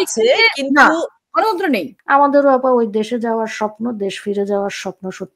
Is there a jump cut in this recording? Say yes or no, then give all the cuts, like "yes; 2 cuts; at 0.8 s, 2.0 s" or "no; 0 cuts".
yes; 1 cut; at 2.0 s